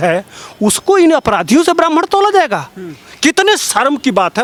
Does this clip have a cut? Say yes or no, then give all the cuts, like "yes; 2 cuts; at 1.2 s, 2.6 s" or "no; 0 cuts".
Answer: no; 0 cuts